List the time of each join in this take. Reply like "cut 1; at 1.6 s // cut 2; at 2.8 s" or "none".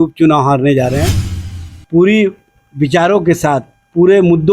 cut 1; at 1.3 s